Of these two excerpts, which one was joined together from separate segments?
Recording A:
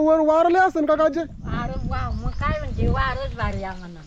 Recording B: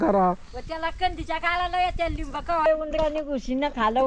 B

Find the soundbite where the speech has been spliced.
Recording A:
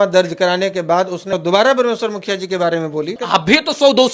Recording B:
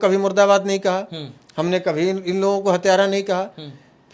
A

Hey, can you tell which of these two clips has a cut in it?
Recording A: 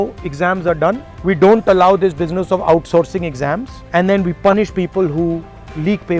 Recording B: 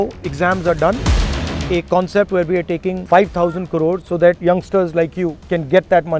B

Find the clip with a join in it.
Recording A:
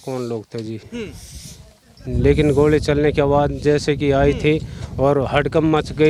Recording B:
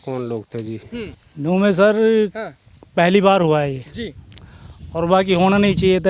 B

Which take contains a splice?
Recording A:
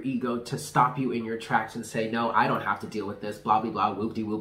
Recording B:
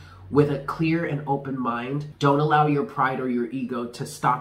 B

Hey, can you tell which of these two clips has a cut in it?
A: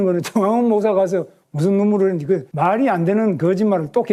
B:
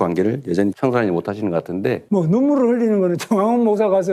B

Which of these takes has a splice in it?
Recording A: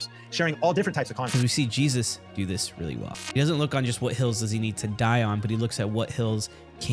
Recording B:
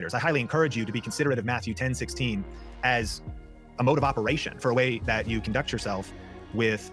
A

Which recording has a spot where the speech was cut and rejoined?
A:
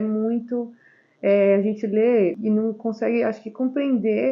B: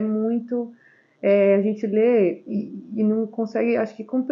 A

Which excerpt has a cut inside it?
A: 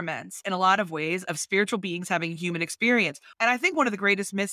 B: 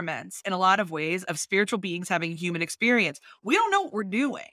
A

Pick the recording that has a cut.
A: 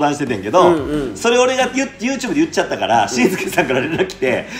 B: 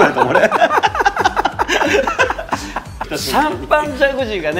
B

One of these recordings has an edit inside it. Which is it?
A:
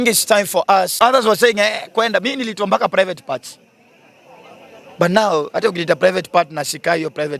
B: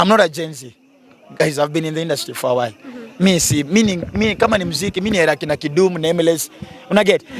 A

